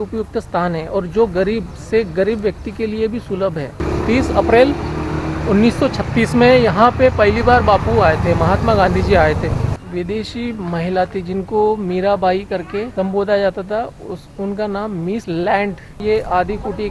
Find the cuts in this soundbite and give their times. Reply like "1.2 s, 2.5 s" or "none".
3.8 s, 9.7 s, 12.9 s, 15.2 s, 16.0 s

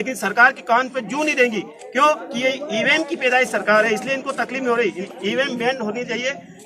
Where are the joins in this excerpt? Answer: 5.1 s

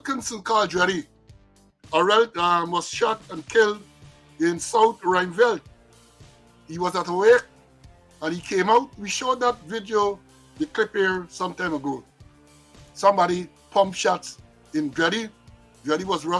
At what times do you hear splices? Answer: none

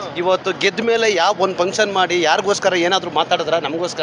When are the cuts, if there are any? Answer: none

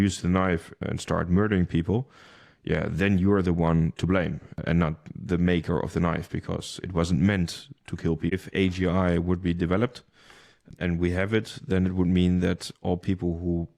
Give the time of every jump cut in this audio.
8.3 s

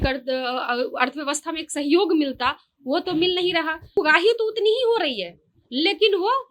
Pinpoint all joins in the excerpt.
4.0 s

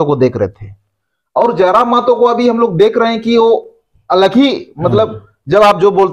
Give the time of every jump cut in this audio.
none

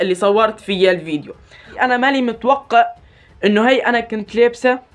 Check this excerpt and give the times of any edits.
1.7 s

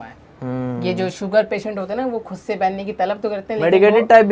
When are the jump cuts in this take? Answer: none

